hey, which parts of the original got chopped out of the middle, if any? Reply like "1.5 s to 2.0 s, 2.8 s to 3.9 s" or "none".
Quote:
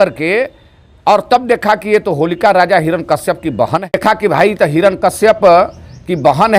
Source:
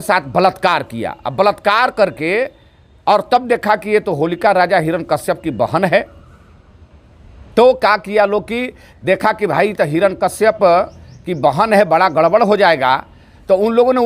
5.9 s to 9.1 s